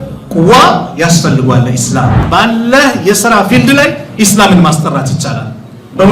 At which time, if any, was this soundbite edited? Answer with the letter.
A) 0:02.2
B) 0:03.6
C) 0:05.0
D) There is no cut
A